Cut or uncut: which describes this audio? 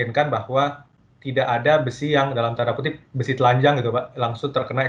uncut